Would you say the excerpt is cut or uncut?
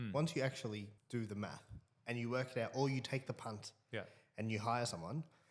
cut